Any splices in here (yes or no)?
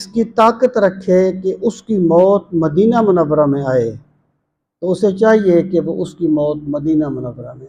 no